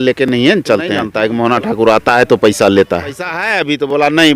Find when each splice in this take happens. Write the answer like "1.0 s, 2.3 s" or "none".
1.1 s, 3.5 s